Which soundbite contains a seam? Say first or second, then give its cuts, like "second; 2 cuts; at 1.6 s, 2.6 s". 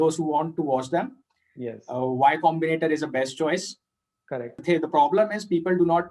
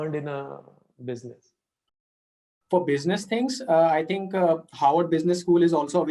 second; 1 cut; at 2.3 s